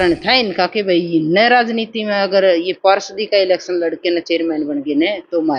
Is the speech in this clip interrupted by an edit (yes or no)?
no